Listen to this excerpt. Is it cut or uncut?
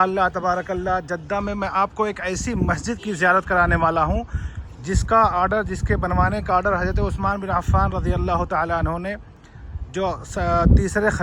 uncut